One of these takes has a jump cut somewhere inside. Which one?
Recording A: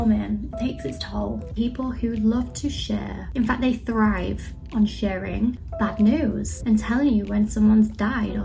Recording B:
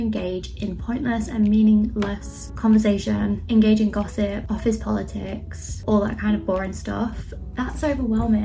A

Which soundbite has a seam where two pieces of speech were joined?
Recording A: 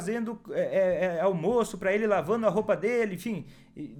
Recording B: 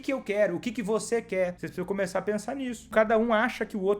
B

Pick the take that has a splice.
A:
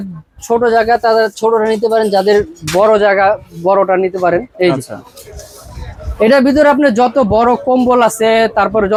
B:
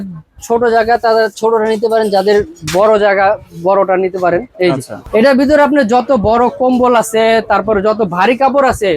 B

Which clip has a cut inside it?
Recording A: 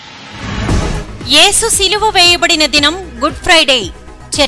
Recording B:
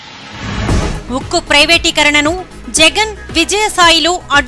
A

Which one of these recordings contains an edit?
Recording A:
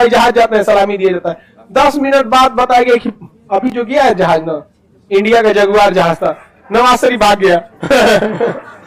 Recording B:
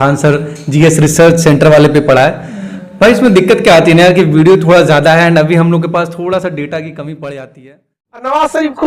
B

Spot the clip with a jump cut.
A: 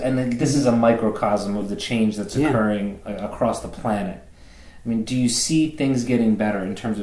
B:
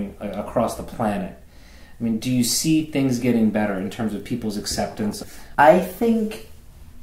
B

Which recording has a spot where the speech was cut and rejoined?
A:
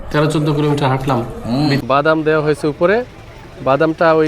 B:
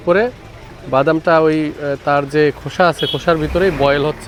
A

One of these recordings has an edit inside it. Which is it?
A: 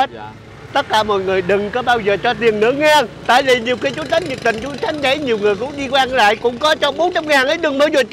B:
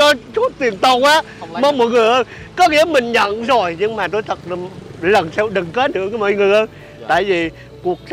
A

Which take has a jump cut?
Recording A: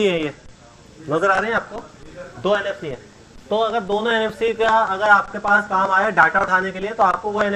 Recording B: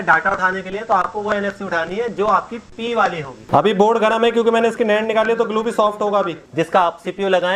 B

